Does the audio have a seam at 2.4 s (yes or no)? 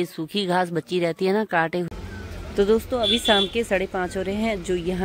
yes